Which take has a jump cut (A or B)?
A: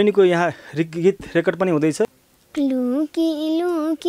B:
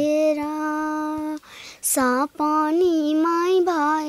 A